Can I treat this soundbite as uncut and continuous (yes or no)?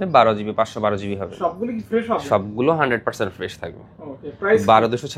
yes